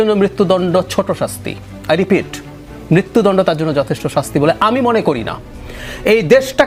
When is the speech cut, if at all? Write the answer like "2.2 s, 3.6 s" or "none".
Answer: none